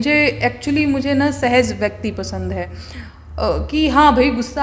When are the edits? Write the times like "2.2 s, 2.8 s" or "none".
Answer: none